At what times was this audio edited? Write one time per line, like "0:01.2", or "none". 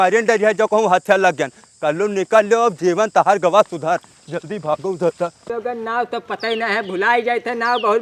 0:05.5